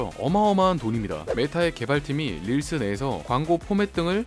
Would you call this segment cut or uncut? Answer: cut